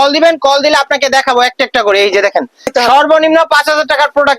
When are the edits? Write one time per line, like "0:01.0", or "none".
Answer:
0:02.7